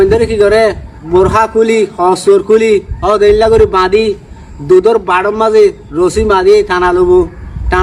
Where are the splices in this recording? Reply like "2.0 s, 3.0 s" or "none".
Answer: 0.9 s